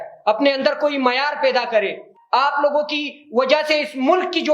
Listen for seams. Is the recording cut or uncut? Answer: uncut